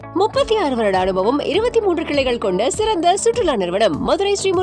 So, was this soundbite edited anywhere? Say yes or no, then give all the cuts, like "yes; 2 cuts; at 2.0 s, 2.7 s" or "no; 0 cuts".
no; 0 cuts